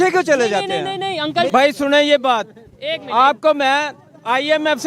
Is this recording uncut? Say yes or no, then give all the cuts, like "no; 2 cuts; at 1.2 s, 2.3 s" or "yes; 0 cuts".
no; 1 cut; at 1.5 s